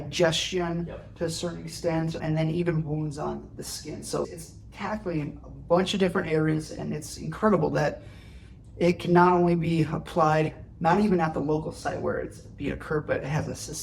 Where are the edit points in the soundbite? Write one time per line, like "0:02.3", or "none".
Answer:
none